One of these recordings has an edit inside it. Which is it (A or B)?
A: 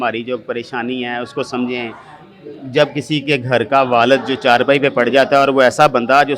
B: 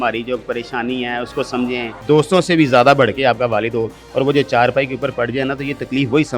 B